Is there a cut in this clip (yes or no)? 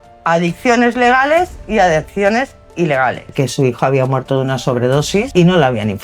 yes